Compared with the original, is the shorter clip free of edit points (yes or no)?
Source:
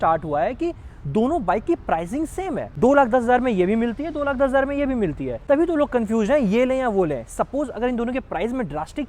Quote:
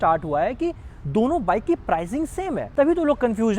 no